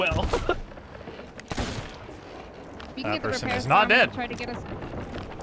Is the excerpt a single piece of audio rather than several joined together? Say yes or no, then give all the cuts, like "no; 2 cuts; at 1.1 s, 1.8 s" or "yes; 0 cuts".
yes; 0 cuts